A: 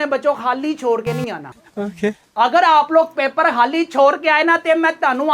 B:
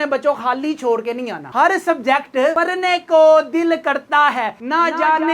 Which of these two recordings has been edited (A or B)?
B